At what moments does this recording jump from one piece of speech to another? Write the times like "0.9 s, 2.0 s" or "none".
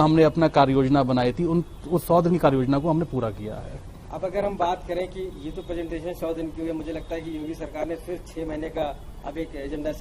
none